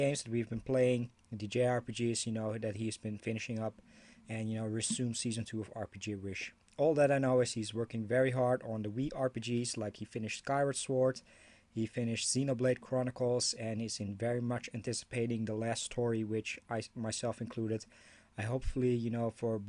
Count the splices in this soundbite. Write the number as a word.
zero